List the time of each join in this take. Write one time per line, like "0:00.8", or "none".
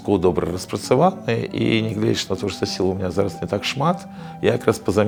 none